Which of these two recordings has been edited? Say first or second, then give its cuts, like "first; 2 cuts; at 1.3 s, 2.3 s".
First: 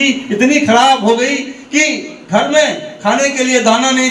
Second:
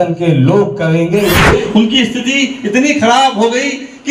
second; 1 cut; at 1.4 s